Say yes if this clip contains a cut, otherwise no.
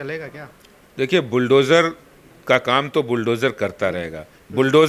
no